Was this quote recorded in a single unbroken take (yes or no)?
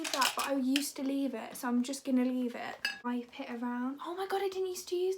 no